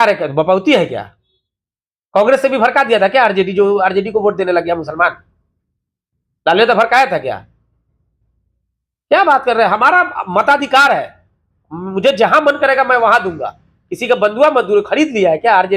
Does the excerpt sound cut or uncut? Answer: uncut